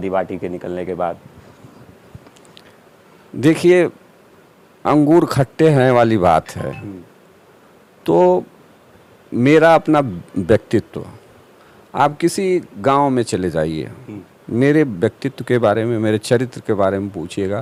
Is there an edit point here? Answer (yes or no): no